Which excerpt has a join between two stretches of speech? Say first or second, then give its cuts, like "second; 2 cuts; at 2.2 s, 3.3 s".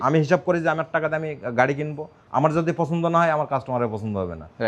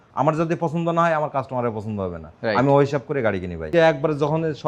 second; 1 cut; at 3.7 s